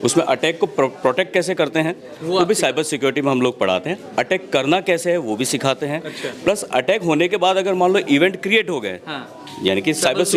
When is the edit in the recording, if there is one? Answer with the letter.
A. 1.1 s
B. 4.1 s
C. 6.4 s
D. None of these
D